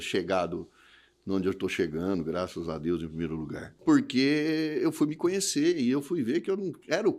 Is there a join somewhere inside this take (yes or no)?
yes